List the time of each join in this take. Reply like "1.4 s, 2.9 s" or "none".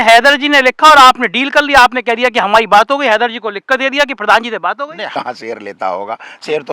5.1 s